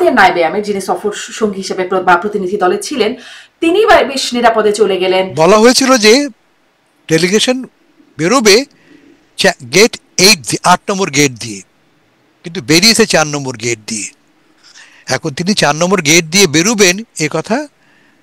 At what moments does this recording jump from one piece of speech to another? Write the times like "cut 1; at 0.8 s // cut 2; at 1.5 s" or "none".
cut 1; at 5.3 s

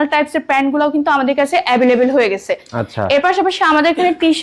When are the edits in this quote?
none

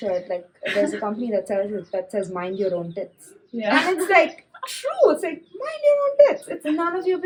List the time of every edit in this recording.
none

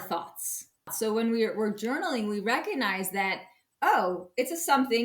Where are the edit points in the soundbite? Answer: cut 1; at 0.9 s

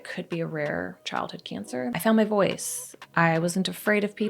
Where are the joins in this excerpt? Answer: cut 1; at 2.0 s

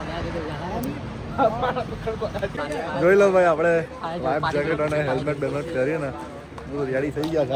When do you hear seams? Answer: none

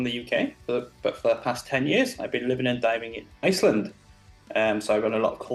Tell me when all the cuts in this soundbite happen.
none

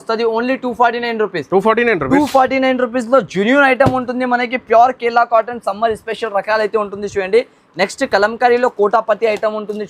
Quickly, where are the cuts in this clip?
none

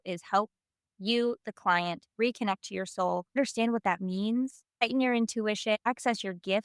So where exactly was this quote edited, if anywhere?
cut 1; at 2.1 s // cut 2; at 3.4 s // cut 3; at 4.6 s // cut 4; at 5.8 s

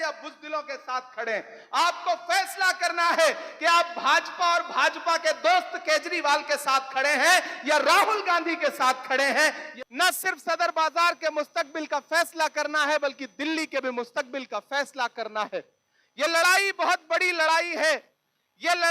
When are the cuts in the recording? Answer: cut 1; at 9.6 s

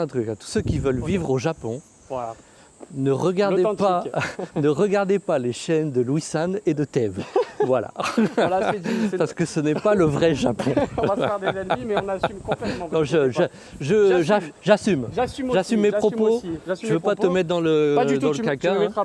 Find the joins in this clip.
none

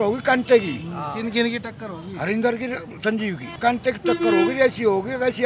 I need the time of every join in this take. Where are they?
cut 1; at 3.5 s

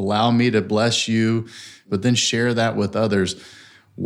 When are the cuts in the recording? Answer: cut 1; at 1.9 s

